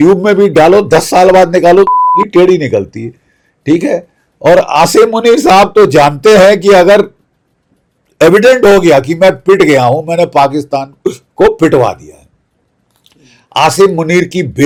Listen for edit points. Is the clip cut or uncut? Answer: uncut